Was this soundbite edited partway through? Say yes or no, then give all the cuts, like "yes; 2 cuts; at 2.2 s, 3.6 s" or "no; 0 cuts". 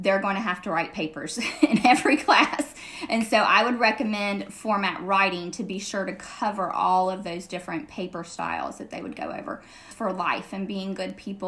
yes; 1 cut; at 9.9 s